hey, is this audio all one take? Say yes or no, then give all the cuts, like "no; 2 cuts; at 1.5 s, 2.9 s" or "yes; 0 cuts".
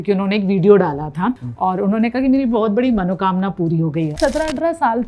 no; 2 cuts; at 1.5 s, 4.2 s